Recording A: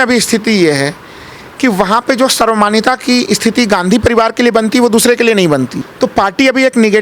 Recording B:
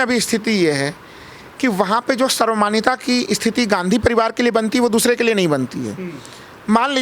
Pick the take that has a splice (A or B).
A